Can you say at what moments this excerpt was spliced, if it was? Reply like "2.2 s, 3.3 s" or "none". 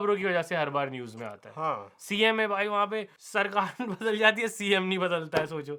none